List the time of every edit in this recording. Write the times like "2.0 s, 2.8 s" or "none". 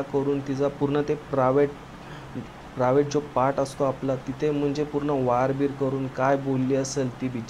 none